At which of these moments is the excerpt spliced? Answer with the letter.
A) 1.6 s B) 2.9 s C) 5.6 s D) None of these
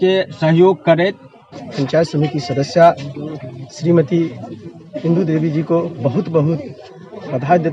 A